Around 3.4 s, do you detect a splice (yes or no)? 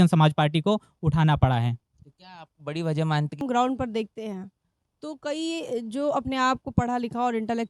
yes